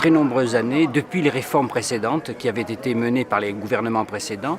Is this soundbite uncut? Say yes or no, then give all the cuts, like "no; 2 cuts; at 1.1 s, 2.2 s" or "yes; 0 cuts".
no; 1 cut; at 1.2 s